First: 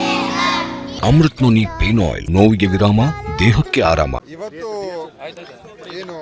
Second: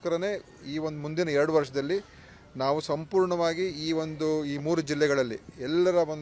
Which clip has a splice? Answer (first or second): first